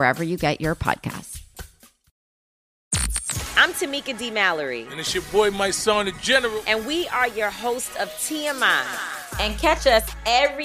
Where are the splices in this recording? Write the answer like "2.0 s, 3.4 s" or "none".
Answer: 2.7 s